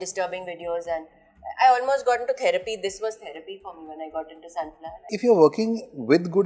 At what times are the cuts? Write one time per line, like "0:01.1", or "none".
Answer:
0:05.0